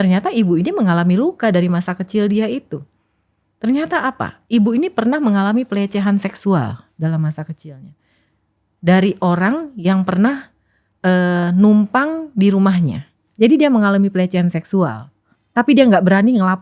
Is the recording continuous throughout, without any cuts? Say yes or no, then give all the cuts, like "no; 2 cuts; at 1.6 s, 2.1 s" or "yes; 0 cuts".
yes; 0 cuts